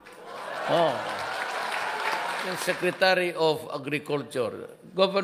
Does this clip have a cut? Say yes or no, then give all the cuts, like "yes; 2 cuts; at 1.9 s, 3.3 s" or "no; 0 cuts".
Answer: yes; 1 cut; at 2.5 s